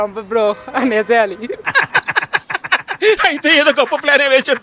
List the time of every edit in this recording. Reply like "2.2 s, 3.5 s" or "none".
none